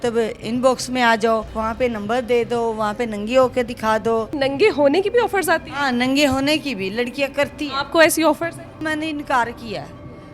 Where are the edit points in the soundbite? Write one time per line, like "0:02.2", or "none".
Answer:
0:01.5
0:04.3
0:08.7

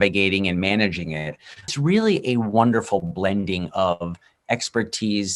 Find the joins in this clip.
0:01.7

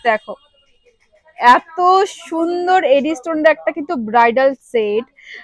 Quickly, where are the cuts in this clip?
none

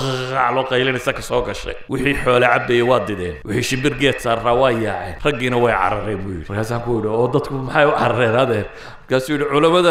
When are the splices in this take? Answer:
0:01.7
0:03.3
0:05.1
0:06.4

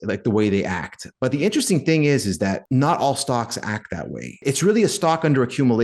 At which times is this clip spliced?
0:02.6
0:04.4

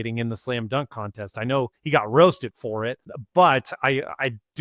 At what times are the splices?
0:01.8
0:03.1

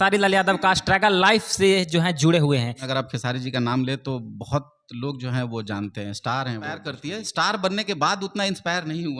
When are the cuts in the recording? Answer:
0:02.9
0:06.9

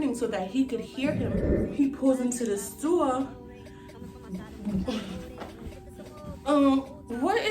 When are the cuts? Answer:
0:01.5

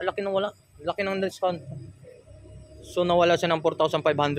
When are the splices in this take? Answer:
none

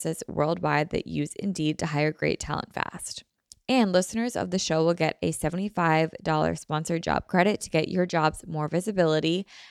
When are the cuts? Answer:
none

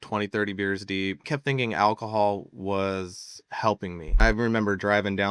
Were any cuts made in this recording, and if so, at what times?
0:01.3
0:04.2

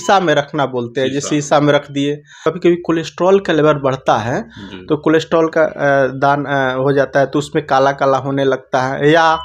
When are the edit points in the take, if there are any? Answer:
0:02.4

